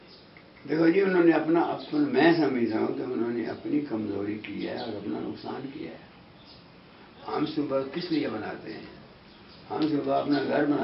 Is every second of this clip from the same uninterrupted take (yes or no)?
yes